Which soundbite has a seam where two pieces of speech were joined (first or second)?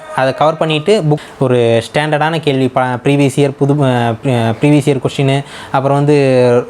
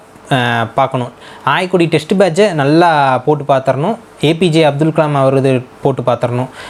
first